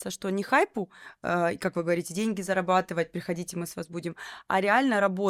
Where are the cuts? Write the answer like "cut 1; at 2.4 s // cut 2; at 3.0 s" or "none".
none